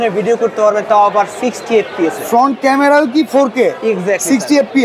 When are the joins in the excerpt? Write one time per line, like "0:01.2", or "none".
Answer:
none